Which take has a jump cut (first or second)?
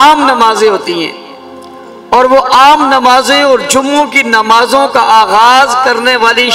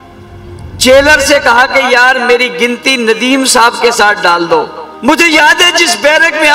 second